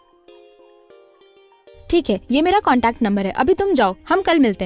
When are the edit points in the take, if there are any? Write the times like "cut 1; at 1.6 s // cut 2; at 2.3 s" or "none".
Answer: none